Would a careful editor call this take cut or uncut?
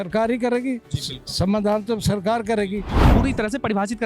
cut